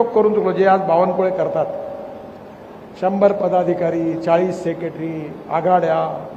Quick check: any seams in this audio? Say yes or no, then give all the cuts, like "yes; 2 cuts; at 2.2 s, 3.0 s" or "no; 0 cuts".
no; 0 cuts